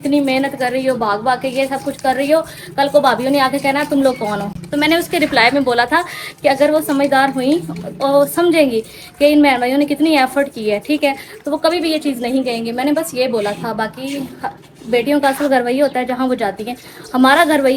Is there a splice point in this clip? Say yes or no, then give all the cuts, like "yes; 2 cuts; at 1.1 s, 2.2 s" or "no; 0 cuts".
no; 0 cuts